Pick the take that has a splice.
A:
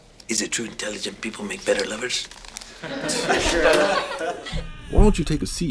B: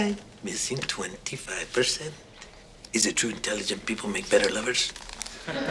A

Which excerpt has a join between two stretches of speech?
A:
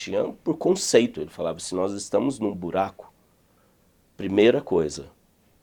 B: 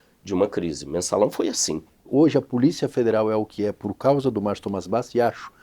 B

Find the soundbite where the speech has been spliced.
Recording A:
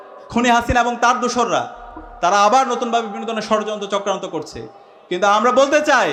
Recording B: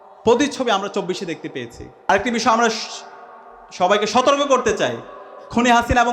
B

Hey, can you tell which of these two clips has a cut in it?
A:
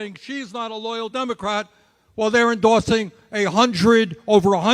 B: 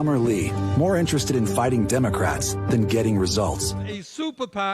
B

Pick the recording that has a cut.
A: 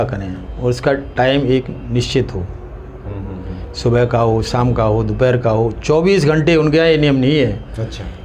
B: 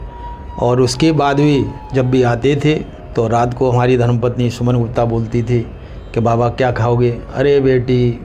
B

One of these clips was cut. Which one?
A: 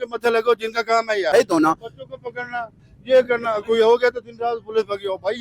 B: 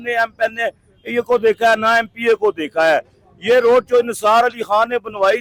A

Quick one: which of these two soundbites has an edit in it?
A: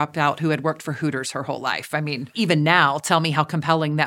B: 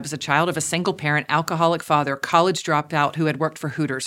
A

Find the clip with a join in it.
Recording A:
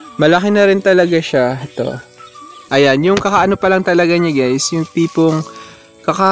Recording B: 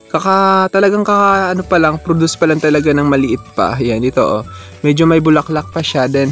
A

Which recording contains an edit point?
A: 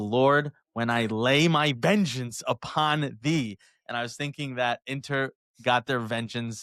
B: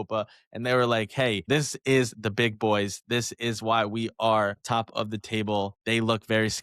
B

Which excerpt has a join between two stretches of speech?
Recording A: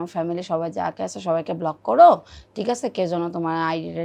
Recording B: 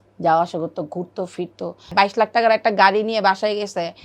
B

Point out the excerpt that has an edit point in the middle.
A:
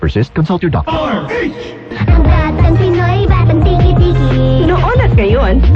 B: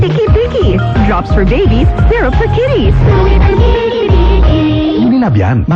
A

